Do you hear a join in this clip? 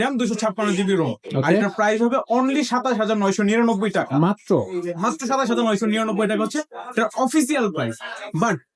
no; 0 cuts

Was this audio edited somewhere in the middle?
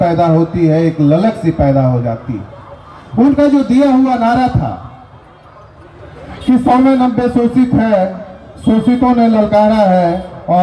no; 0 cuts

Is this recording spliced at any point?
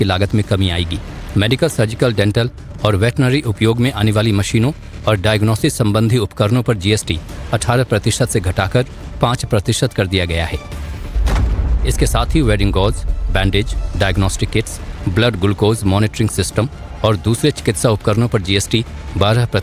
no; 0 cuts

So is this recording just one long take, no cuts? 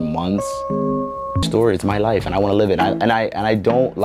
yes; 0 cuts

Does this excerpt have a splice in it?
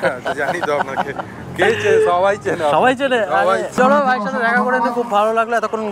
no; 0 cuts

